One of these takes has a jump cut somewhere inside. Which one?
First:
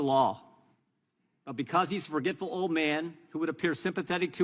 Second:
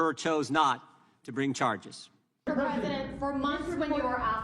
second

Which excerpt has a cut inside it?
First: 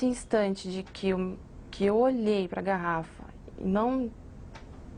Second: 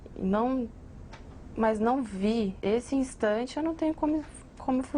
second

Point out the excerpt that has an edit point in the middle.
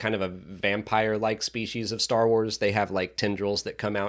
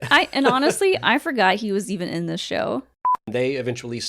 second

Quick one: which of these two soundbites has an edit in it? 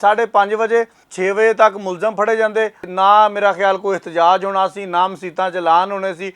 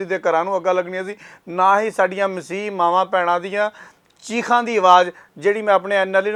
first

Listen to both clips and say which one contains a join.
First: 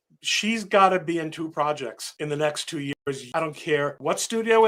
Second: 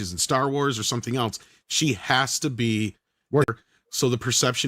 second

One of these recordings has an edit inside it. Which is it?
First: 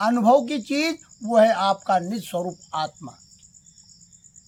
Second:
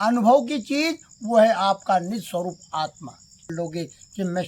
second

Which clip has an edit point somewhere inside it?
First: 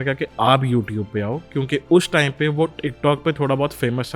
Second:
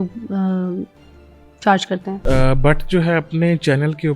second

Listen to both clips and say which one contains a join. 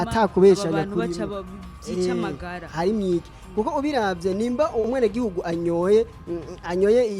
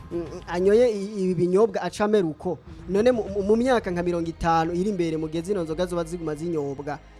first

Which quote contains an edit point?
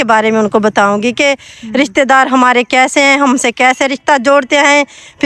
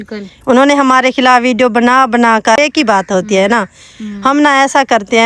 second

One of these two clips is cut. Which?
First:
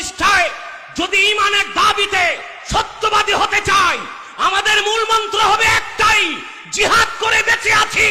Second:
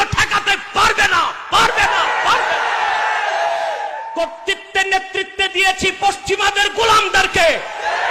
second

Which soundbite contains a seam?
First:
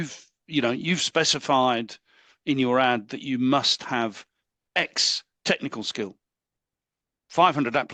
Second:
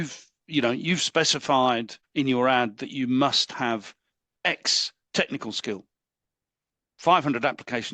second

